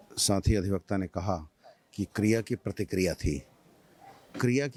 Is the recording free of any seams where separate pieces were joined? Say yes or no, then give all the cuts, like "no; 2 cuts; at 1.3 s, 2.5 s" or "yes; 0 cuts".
yes; 0 cuts